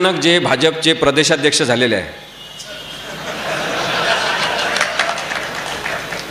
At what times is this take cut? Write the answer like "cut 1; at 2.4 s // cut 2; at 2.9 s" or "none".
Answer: none